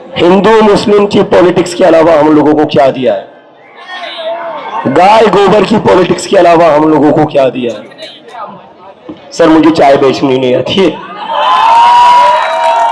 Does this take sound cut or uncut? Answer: cut